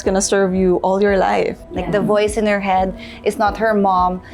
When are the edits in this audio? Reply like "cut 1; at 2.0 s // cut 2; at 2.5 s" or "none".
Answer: cut 1; at 1.6 s